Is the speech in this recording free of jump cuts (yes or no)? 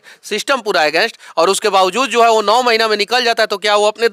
yes